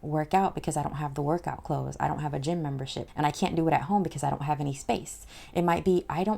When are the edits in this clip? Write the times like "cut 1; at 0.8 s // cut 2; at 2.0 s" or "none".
cut 1; at 3.0 s

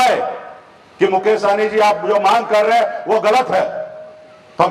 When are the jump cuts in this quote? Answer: none

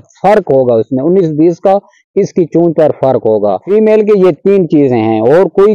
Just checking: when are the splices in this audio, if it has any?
cut 1; at 3.6 s

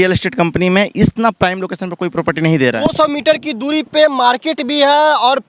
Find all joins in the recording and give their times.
cut 1; at 2.8 s

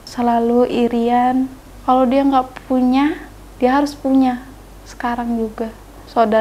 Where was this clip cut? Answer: none

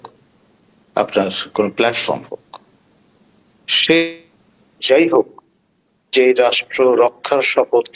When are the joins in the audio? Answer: cut 1; at 4.8 s

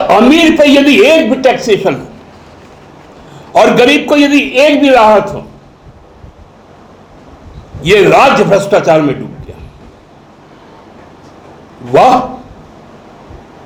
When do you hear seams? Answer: none

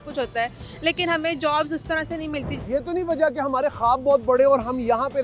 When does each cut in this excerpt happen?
cut 1; at 2.5 s

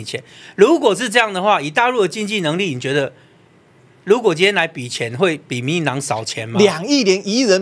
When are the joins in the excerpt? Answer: none

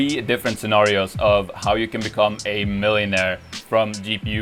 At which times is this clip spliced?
none

